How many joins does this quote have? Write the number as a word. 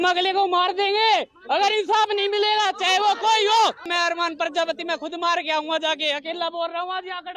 one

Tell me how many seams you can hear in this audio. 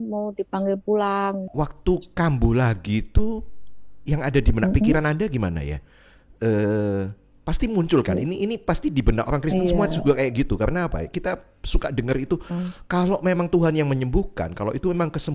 one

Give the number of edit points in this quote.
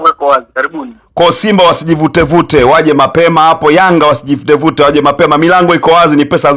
zero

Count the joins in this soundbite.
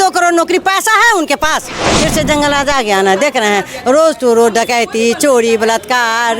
one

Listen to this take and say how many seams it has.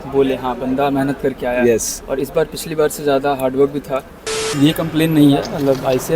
one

